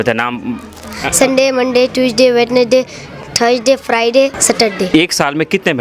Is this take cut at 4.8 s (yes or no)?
yes